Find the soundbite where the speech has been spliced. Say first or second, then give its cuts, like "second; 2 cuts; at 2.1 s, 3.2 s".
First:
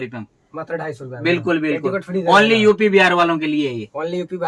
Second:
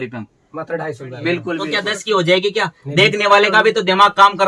second; 1 cut; at 1.8 s